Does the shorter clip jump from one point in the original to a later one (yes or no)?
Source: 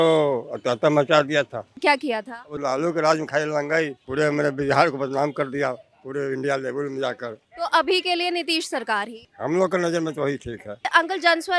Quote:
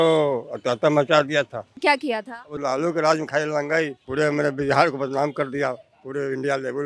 no